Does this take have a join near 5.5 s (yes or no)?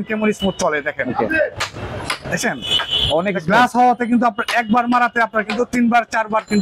no